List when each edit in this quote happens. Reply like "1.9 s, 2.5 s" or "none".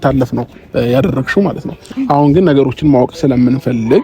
1.9 s